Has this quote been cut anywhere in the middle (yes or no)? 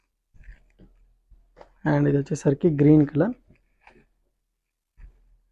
no